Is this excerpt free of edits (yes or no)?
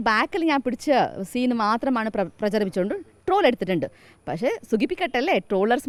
yes